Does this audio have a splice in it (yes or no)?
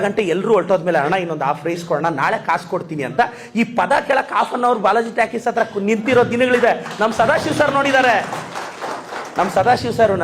no